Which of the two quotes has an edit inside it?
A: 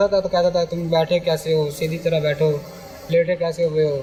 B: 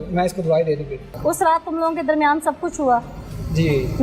B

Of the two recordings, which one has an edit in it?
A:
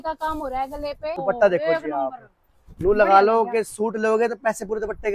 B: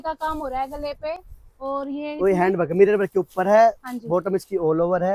A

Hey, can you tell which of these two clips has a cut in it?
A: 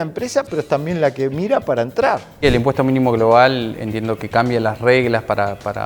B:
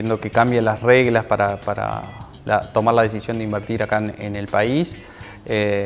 A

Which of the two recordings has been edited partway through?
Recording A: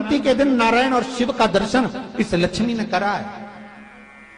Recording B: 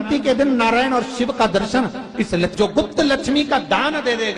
B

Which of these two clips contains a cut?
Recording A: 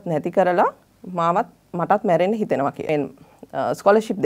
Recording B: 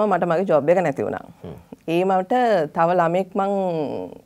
A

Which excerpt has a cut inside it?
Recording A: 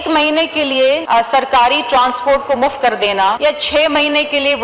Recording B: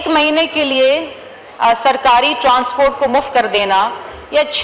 A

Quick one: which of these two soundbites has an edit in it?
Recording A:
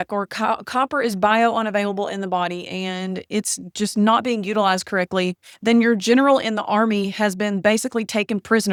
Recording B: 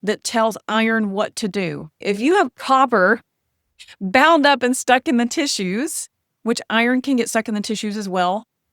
B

